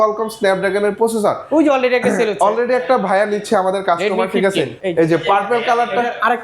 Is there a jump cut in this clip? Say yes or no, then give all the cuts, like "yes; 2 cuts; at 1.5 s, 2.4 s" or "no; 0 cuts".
yes; 1 cut; at 4.8 s